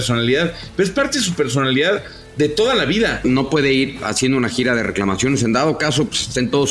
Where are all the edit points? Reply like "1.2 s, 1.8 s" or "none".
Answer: 3.2 s